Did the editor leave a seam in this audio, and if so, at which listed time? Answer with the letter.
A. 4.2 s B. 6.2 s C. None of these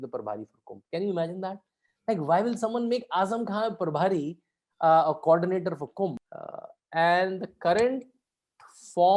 B